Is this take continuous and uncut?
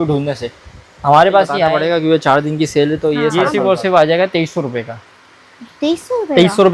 no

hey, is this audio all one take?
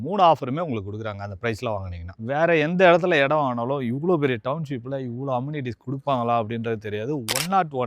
no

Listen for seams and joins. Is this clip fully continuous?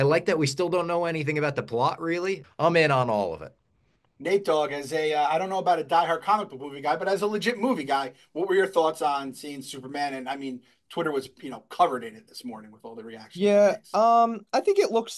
no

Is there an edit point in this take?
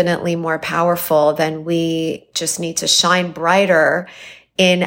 no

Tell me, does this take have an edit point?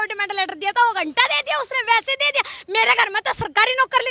no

